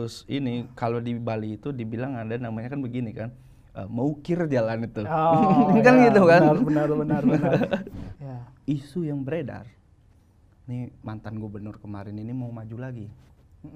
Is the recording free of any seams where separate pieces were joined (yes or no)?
no